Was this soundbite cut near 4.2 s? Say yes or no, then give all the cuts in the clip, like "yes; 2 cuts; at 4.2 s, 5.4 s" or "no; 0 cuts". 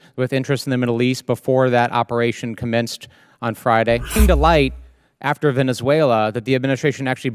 yes; 1 cut; at 4.2 s